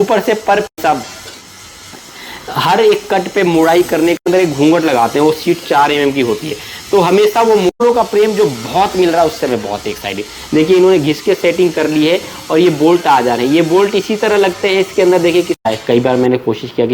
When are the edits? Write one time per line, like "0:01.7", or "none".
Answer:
0:00.8
0:04.3
0:07.7
0:15.7

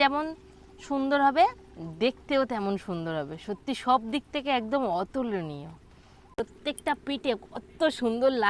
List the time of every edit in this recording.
0:06.4

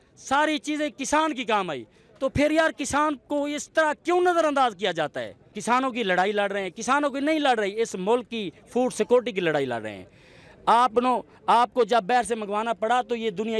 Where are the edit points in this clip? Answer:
0:05.5

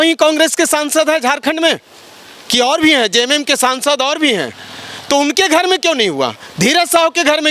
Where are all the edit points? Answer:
none

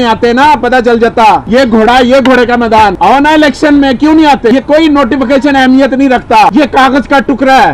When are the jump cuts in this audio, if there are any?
0:01.4
0:03.0
0:04.5

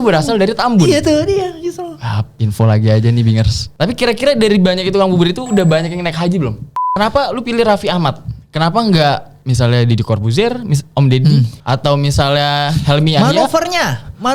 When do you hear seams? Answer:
0:06.7

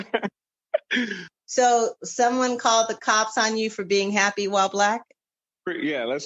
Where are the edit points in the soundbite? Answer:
0:01.3

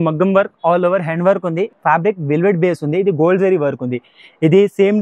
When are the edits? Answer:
0:01.7

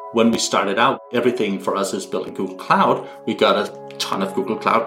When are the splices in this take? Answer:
0:01.0

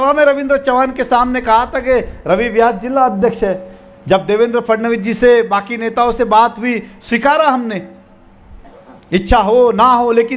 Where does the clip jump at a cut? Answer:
none

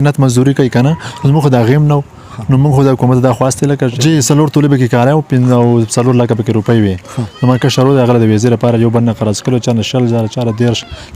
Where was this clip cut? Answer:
0:03.9

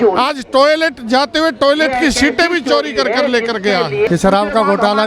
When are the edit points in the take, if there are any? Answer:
0:04.1

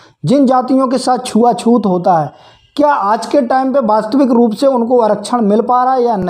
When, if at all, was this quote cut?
none

